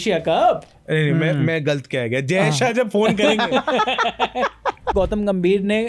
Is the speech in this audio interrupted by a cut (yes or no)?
yes